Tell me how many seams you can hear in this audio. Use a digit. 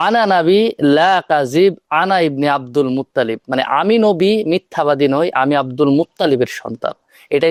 0